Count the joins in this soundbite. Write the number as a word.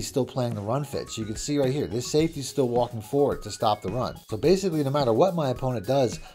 one